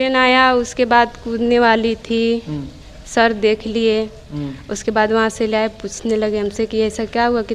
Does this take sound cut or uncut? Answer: uncut